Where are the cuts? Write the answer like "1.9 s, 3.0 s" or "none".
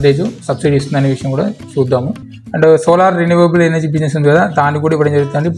2.2 s